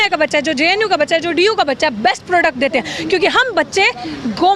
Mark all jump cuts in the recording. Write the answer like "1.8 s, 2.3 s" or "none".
none